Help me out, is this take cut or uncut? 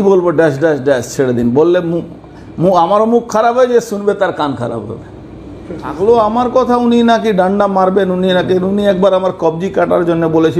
cut